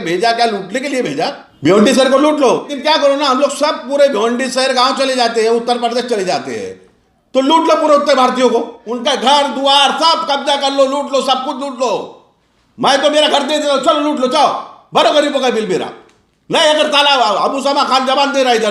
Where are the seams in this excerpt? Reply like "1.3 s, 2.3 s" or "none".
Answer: 1.4 s, 2.7 s, 8.8 s